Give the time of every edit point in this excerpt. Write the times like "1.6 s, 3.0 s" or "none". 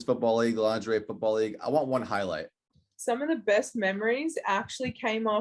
2.6 s

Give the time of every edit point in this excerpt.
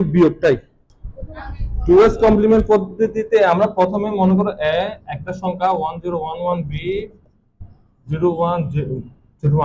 1.2 s

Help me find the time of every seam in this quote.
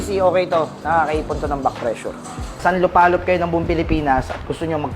2.5 s

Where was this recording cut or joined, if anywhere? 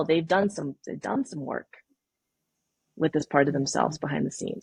none

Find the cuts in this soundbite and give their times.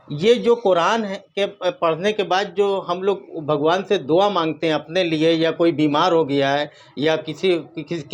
none

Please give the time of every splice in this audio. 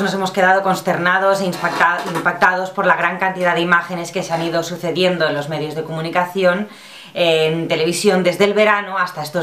4.8 s

